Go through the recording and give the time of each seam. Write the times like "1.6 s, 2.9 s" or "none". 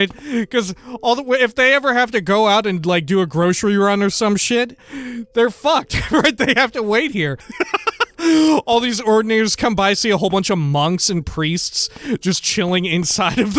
4.8 s, 7.5 s